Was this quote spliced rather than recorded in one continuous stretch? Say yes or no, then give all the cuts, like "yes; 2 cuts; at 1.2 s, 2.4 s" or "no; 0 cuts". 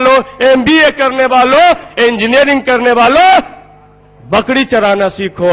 no; 0 cuts